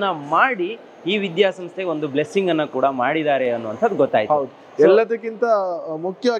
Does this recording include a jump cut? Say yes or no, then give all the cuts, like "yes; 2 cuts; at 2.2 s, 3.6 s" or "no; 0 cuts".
no; 0 cuts